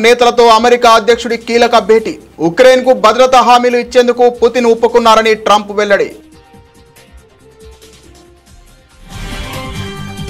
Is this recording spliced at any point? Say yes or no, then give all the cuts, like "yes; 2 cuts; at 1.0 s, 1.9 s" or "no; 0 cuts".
yes; 1 cut; at 6.3 s